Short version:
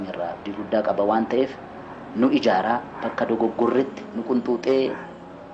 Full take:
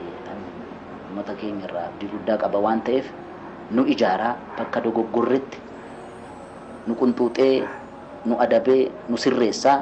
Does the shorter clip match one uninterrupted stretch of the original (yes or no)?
no